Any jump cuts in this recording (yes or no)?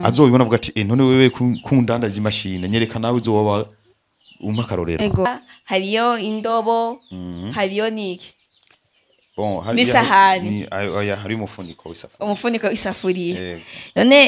yes